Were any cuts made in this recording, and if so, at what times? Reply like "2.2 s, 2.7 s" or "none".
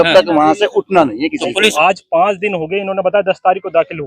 1.7 s